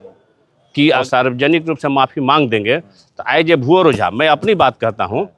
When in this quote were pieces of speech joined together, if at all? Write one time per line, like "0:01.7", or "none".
0:01.0